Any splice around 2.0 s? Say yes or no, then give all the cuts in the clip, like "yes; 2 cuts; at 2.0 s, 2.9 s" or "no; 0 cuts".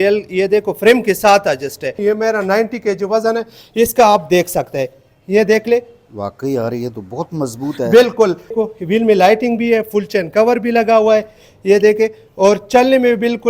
yes; 2 cuts; at 2.0 s, 8.5 s